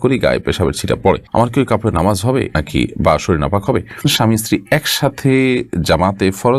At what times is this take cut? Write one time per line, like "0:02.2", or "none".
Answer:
0:01.2
0:02.6
0:04.0